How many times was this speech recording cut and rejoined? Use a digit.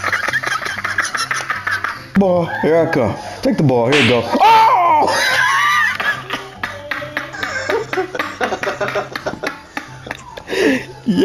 1